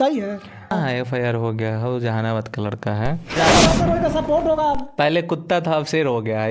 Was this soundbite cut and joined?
yes; 2 cuts; at 0.7 s, 3.4 s

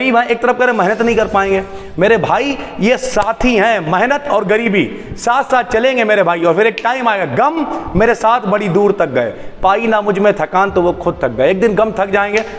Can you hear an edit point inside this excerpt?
no; 0 cuts

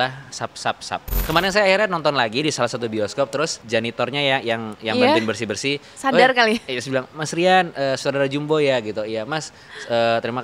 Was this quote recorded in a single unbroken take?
no; 2 cuts; at 1.2 s, 3.6 s

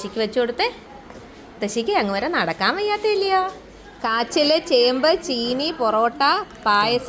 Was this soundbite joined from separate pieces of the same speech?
no; 0 cuts

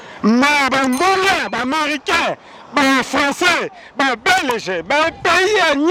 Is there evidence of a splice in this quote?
no; 0 cuts

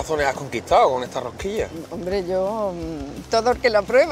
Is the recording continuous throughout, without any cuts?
yes; 0 cuts

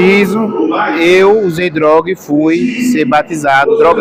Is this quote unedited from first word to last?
yes; 0 cuts

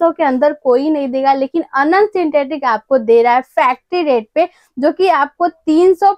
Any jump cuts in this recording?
no; 0 cuts

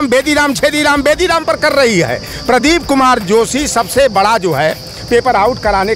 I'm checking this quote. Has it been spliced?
no; 0 cuts

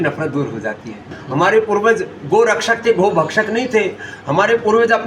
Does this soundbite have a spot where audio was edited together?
yes; 1 cut; at 1.1 s

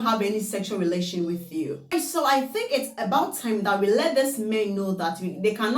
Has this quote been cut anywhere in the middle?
yes; 1 cut; at 2.0 s

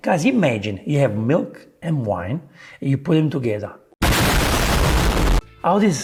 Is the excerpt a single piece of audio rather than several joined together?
yes; 0 cuts

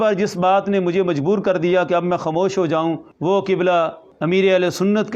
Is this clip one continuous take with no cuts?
no; 2 cuts; at 3.1 s, 4.1 s

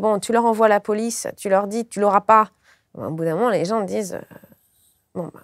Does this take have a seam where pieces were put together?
no; 0 cuts

